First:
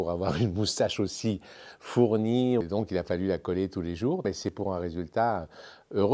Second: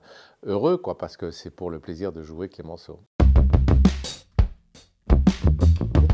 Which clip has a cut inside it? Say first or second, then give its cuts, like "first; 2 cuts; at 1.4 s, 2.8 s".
first; 2 cuts; at 2.6 s, 4.4 s